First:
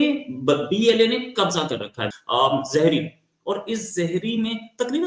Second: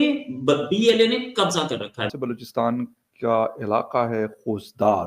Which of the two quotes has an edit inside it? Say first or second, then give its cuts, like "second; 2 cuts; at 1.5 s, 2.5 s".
second; 1 cut; at 2.2 s